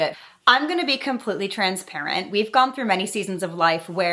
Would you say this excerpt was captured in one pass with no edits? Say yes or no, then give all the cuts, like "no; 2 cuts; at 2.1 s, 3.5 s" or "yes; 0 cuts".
yes; 0 cuts